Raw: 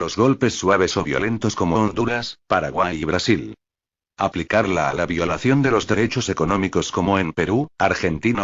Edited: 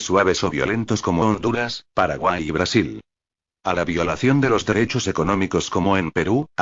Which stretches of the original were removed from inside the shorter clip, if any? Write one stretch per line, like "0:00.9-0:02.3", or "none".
0:04.2-0:04.9